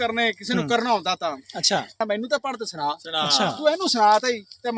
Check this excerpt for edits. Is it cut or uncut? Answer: cut